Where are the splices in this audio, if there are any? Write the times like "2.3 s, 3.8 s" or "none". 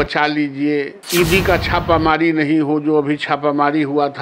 1.0 s